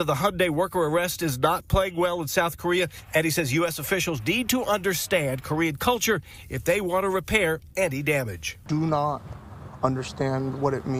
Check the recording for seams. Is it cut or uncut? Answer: uncut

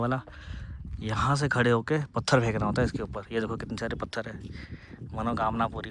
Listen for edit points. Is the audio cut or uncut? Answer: uncut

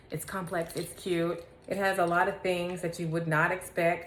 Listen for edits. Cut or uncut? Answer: uncut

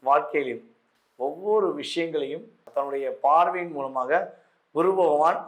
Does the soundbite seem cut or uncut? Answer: cut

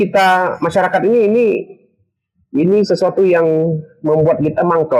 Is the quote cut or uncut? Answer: uncut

